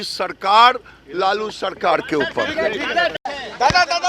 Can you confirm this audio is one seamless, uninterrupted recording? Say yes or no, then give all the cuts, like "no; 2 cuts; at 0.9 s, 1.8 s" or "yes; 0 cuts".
yes; 0 cuts